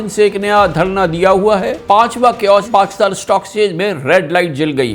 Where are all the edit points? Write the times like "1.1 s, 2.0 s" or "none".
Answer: 1.8 s, 2.7 s